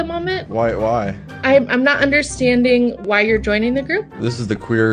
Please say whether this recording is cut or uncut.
uncut